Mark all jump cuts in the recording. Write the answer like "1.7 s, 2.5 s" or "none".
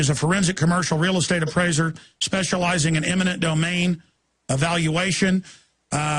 2.8 s